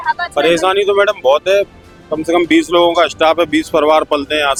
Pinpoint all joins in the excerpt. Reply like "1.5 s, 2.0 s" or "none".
none

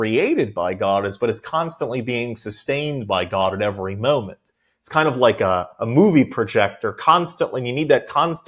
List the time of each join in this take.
none

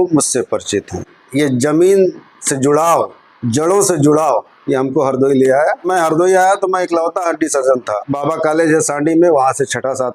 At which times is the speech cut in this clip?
1.2 s, 5.9 s, 8.0 s

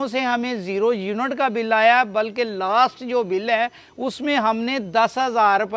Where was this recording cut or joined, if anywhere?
none

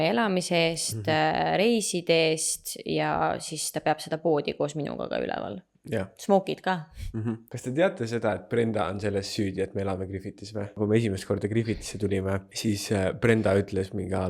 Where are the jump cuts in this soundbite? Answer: 7.5 s, 10.8 s, 12.5 s

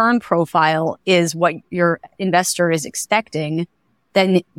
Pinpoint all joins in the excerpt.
1.7 s

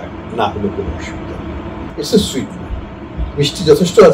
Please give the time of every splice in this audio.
1.9 s

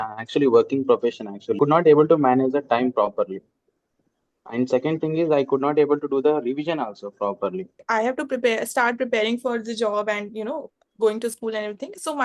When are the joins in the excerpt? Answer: 1.6 s, 7.8 s

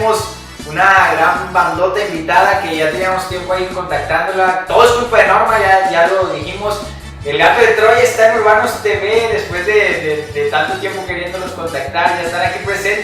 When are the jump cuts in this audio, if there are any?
6.4 s

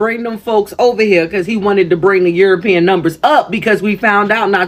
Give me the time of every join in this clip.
none

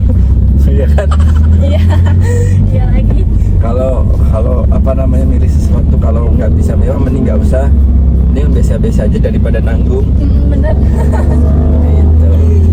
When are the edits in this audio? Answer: none

